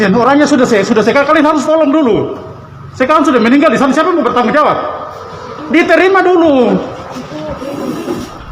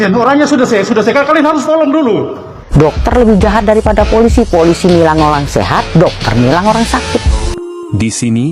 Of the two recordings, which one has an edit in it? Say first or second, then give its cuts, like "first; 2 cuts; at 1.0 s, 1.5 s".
second; 2 cuts; at 2.6 s, 7.4 s